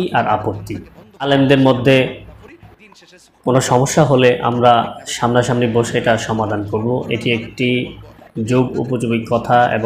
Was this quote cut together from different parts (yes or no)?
yes